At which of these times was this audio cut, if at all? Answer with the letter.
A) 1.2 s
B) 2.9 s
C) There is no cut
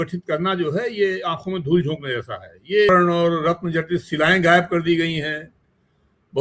B